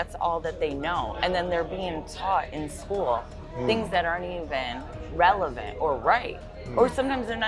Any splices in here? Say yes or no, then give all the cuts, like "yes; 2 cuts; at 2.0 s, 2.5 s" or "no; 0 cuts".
no; 0 cuts